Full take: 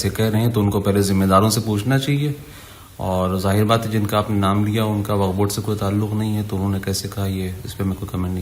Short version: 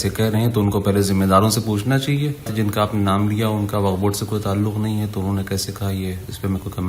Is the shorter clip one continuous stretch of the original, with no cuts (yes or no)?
no